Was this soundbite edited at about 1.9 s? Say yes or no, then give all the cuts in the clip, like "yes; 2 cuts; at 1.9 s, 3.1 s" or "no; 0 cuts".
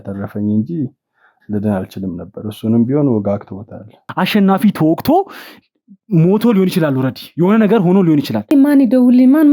no; 2 cuts; at 4.0 s, 8.5 s